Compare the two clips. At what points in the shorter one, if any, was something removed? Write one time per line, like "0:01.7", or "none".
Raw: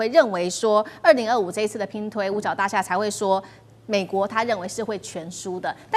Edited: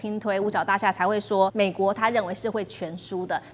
0:01.5